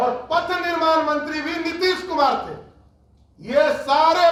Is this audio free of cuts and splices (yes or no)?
yes